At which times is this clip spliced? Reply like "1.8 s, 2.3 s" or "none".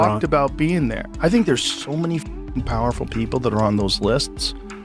1.0 s